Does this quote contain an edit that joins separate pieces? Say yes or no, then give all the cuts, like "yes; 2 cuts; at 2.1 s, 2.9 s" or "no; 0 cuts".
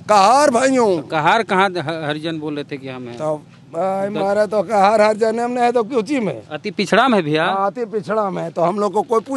no; 0 cuts